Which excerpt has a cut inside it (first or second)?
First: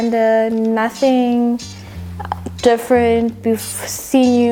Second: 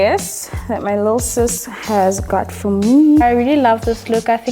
second